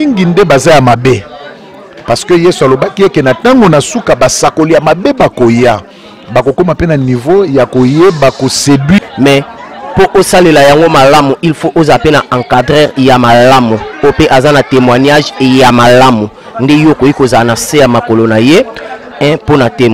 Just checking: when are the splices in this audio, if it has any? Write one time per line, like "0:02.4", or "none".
0:09.0